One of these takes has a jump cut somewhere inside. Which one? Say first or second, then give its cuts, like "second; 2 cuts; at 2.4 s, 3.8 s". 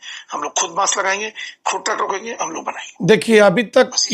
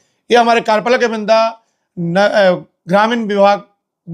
first; 1 cut; at 2.9 s